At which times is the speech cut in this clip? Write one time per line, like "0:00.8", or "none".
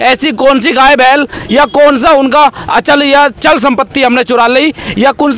none